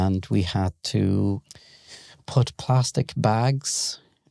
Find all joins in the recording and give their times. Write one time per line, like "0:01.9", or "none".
none